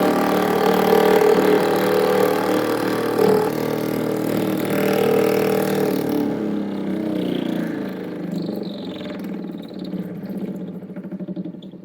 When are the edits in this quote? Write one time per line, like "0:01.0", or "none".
0:03.5

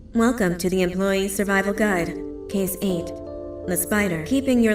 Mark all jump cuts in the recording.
0:02.1

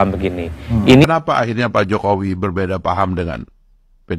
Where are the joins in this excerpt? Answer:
0:01.0

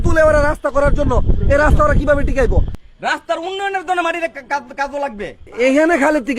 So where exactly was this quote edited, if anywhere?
0:02.7
0:05.4

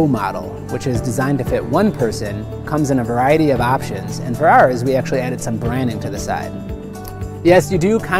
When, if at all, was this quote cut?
none

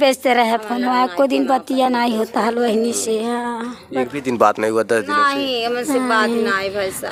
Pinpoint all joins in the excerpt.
none

